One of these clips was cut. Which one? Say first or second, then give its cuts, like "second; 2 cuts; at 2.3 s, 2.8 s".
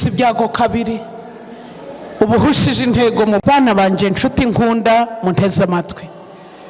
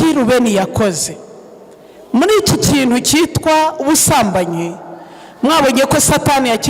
first; 1 cut; at 3.4 s